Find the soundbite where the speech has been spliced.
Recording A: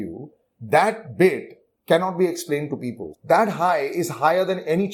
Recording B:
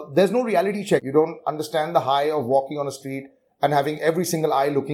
B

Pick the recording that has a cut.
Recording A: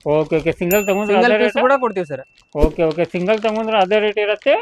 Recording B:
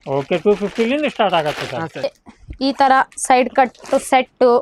B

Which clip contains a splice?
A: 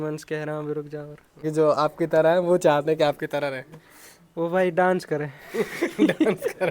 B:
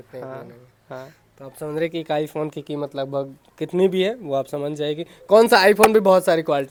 A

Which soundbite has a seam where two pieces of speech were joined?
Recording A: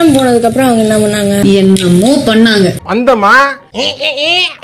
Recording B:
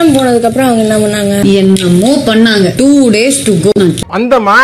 A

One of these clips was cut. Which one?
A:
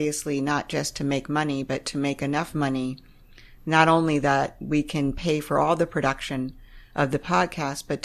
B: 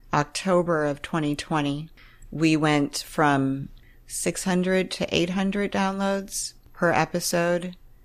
B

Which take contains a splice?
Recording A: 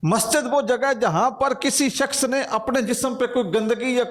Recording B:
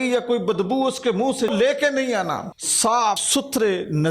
B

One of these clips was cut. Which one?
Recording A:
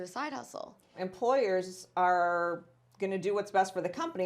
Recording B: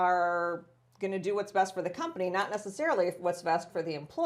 A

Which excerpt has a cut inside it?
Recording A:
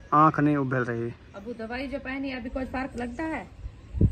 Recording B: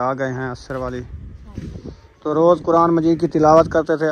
A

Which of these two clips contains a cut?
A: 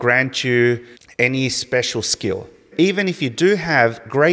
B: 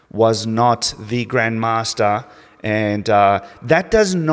A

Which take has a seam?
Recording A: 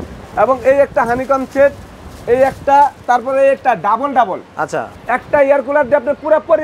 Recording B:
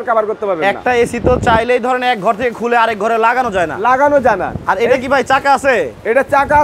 A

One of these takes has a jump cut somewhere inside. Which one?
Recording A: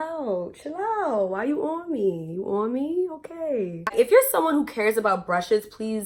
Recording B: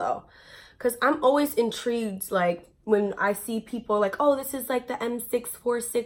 A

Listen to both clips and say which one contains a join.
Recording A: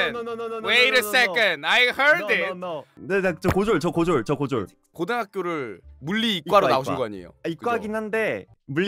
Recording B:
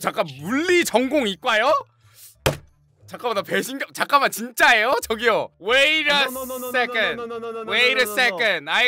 A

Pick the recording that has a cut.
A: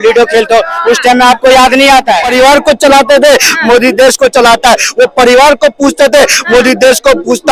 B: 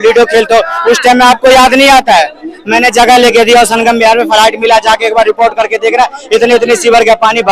A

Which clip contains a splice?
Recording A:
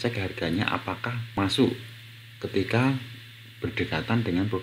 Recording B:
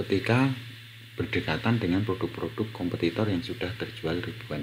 A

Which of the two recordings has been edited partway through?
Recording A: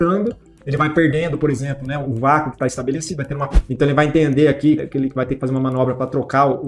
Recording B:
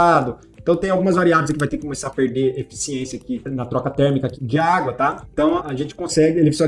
A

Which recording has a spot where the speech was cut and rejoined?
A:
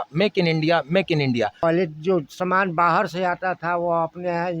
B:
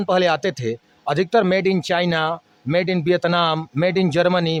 A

